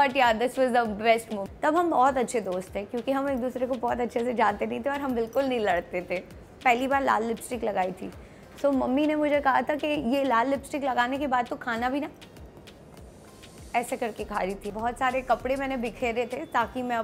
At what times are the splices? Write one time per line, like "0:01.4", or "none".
0:01.4
0:06.6
0:14.7